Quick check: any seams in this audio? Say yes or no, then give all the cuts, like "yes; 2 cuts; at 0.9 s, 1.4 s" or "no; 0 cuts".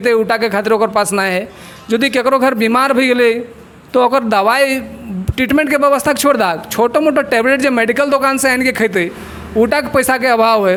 no; 0 cuts